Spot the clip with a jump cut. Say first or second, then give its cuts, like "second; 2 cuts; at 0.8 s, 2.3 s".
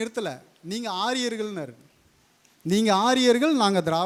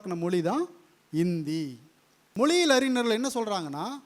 second; 1 cut; at 2.2 s